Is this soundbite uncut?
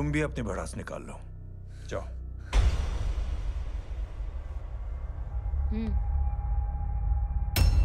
yes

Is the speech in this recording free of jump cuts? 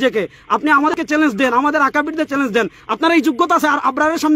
no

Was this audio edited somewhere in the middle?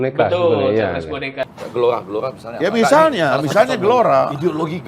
yes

